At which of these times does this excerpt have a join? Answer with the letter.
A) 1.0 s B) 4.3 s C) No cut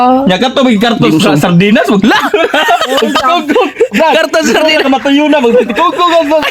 C